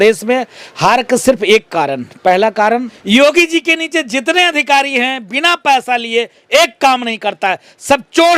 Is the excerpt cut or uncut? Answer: cut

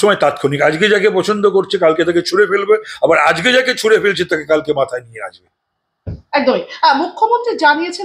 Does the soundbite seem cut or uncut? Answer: uncut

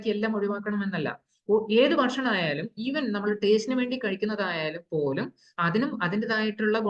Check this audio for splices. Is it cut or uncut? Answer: uncut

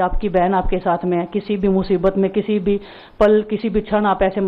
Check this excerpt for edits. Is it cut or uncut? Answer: uncut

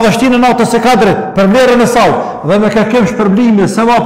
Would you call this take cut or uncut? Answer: cut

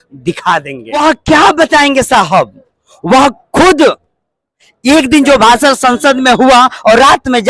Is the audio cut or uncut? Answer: cut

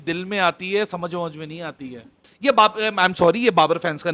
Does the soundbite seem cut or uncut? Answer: cut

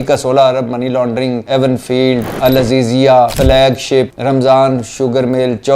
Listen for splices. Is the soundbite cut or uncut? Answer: cut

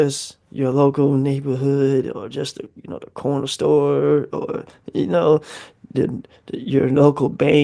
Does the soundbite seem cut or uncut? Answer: uncut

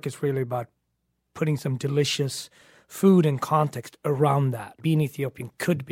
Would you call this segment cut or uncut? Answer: cut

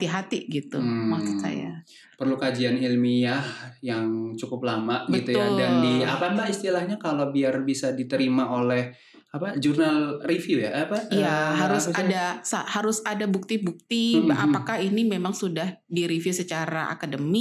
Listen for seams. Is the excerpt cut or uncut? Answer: uncut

